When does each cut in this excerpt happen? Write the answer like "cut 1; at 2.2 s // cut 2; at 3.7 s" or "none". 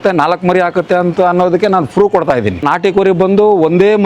cut 1; at 2.6 s